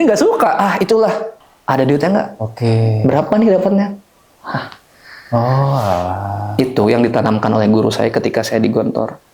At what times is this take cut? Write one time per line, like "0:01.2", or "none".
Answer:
0:01.3